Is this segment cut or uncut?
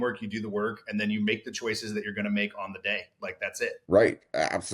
cut